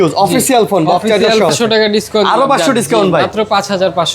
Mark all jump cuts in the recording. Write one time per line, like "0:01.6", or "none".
0:01.5